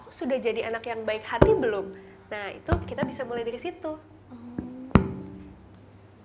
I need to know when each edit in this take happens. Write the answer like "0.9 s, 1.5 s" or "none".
none